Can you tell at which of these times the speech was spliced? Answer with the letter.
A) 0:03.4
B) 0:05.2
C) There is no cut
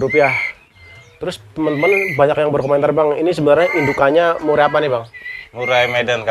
C